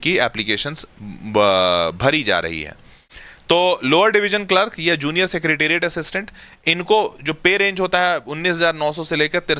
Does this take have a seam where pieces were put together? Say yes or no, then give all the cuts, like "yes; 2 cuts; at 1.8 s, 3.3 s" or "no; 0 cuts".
no; 0 cuts